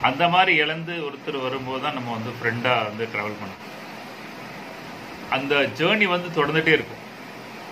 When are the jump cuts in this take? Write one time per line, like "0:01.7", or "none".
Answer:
0:03.6